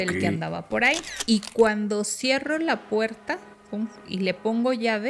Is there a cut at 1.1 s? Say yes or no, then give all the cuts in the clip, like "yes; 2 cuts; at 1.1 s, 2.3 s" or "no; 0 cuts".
yes; 1 cut; at 1.1 s